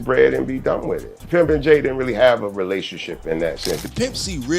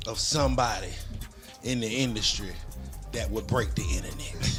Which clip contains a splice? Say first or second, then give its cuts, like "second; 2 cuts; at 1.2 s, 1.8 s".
first; 2 cuts; at 1.2 s, 3.8 s